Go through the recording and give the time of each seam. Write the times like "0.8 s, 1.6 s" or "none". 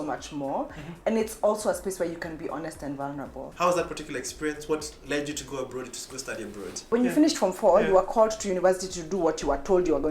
3.5 s, 6.9 s